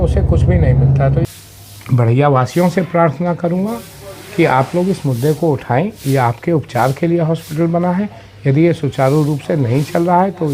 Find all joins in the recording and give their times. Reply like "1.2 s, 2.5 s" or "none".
1.2 s